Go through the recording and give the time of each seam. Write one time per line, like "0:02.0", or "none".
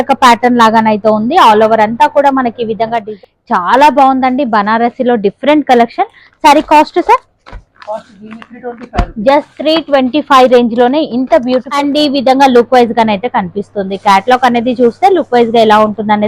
0:03.1
0:11.7